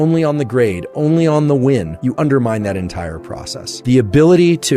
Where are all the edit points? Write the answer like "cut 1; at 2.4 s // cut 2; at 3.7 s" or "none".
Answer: cut 1; at 2.0 s // cut 2; at 3.8 s